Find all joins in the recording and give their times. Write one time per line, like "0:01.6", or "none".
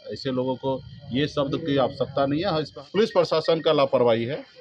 0:02.7